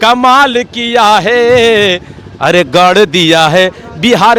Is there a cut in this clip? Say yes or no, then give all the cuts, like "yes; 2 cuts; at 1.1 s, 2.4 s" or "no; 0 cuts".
no; 0 cuts